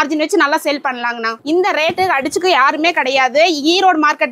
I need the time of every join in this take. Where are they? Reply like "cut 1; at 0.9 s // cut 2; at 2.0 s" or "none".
cut 1; at 1.3 s